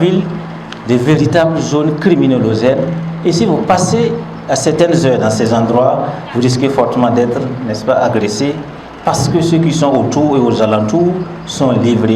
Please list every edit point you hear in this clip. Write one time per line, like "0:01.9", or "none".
none